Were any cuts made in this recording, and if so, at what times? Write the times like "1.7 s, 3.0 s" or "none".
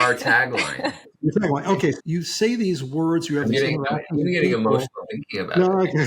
1.1 s, 2.0 s